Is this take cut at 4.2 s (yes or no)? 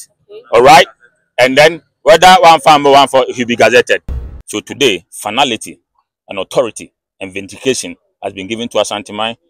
yes